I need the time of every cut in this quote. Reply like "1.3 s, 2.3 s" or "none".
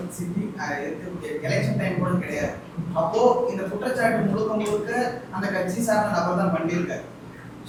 none